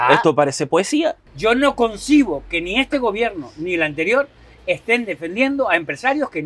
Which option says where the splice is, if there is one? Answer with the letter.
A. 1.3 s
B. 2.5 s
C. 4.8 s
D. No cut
A